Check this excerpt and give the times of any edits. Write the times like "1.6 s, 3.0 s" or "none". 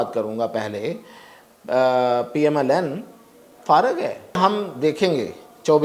4.4 s